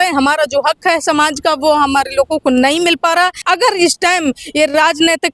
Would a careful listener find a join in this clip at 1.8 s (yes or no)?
no